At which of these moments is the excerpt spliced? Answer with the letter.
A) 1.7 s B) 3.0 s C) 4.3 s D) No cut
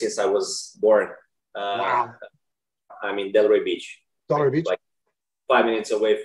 B